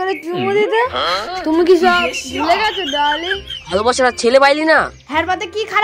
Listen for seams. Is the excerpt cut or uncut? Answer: cut